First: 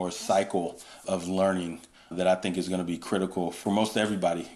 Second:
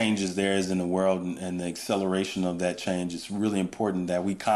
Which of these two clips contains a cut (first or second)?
first